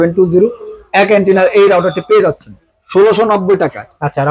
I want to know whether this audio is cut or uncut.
cut